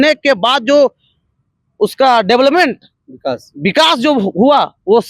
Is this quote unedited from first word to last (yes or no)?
yes